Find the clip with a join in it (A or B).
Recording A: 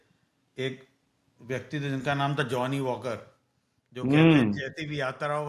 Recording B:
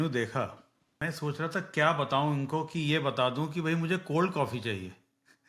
B